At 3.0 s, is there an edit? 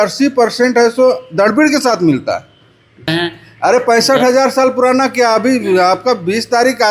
yes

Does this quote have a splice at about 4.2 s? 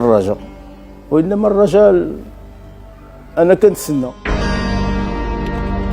yes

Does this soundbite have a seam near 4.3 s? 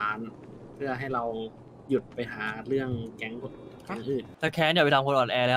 yes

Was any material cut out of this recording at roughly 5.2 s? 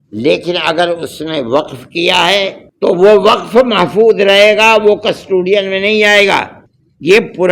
no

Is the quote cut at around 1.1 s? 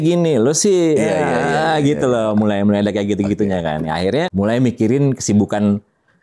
no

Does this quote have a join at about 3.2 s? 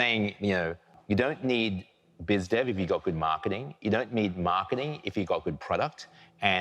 no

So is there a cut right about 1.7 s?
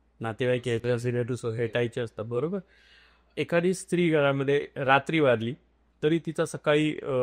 no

